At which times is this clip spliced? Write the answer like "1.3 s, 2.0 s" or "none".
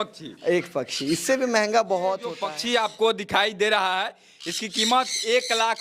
2.5 s